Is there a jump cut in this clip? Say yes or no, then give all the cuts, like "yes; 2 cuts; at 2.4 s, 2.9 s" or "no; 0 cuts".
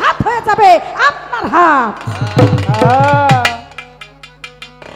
no; 0 cuts